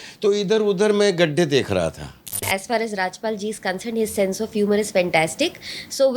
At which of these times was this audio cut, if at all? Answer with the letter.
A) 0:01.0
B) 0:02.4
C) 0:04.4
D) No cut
B